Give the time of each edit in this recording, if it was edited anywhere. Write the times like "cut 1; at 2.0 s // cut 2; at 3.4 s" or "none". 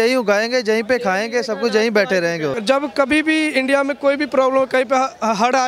cut 1; at 2.6 s